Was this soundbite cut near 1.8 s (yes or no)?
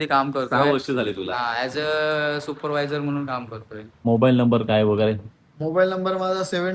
no